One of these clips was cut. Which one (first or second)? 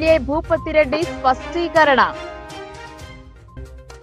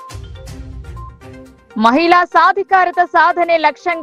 second